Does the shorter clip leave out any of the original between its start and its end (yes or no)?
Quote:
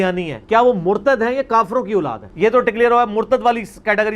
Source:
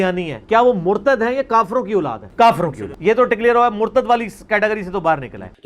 yes